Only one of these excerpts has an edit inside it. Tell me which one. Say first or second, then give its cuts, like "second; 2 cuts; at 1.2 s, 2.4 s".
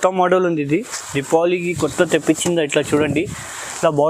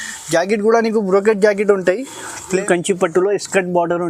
second; 1 cut; at 2.6 s